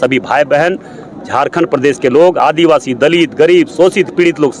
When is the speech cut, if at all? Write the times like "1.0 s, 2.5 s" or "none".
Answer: none